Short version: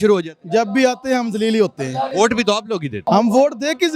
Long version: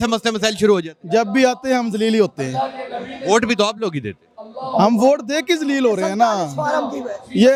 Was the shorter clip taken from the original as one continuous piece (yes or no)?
no